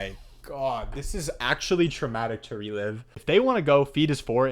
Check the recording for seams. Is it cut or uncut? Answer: cut